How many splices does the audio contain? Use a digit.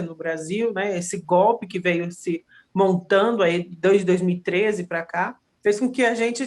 1